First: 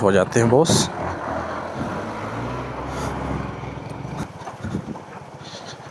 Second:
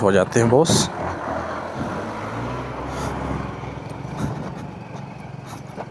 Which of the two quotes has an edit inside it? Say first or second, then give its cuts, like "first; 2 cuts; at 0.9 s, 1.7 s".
first; 1 cut; at 4.2 s